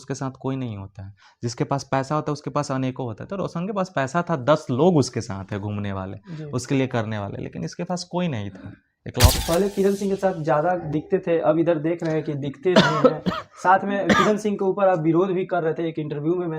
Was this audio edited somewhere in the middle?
yes; 1 cut; at 9.4 s

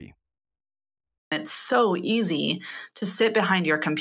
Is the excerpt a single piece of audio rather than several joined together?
no; 1 cut; at 1.3 s

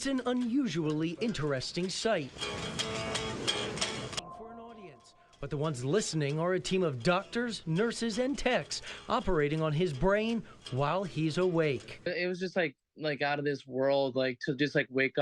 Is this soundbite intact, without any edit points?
no; 1 cut; at 4.2 s

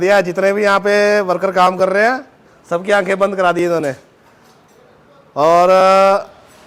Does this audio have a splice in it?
no; 0 cuts

